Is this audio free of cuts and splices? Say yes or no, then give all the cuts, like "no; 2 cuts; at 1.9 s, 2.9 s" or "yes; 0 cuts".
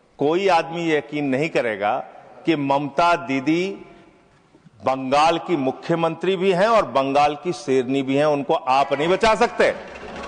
yes; 0 cuts